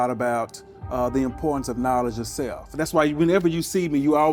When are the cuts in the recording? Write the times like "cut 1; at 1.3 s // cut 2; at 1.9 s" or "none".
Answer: none